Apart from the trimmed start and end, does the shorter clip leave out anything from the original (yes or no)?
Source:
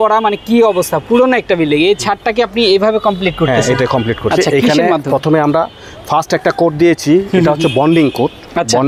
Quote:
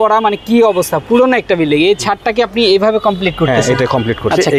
no